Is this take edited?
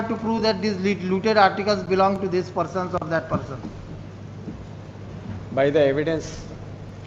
no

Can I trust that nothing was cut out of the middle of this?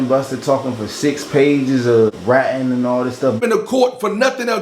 no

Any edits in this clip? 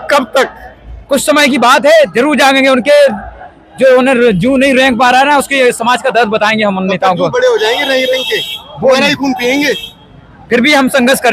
no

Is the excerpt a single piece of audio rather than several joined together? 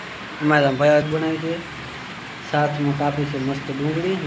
no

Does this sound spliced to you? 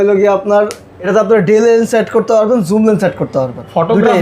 yes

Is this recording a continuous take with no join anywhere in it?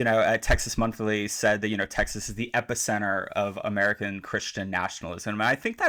yes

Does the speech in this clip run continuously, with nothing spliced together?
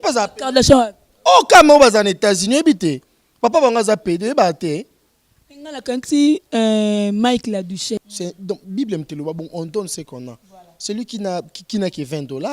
no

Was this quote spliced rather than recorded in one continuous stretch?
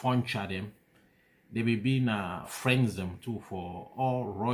yes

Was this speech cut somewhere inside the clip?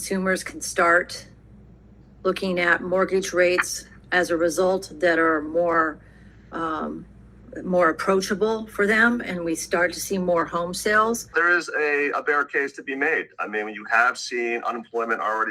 yes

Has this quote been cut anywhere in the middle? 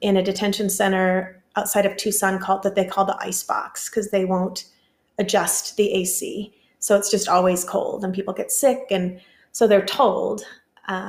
no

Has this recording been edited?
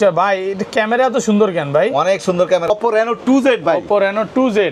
yes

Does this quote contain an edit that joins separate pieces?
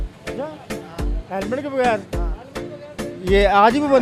no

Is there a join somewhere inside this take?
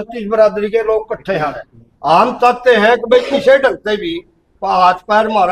no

